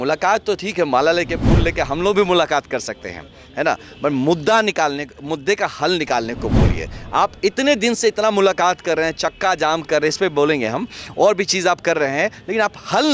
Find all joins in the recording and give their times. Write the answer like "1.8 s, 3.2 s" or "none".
none